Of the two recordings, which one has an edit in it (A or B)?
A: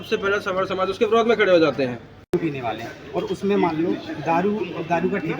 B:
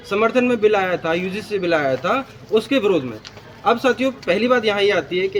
A